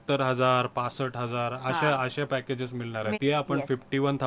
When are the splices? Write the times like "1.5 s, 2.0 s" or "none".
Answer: 3.1 s